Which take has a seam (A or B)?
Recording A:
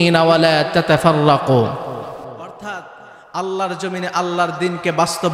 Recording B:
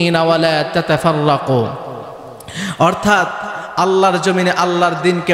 A